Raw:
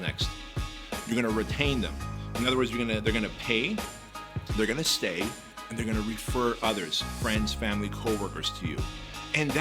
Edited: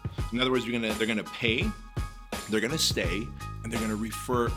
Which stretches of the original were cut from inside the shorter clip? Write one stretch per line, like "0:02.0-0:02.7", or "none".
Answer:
none